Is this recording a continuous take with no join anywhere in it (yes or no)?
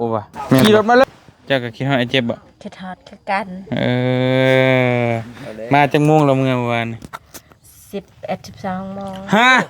no